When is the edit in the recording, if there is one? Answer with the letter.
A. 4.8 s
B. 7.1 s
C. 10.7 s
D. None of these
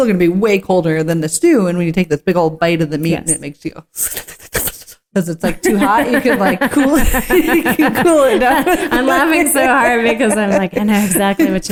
D